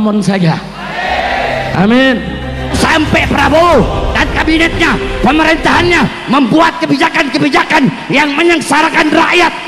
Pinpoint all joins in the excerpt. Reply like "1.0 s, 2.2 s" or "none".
2.8 s